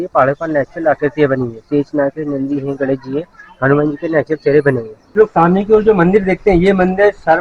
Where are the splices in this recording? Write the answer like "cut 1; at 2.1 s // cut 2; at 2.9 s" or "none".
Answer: cut 1; at 5.1 s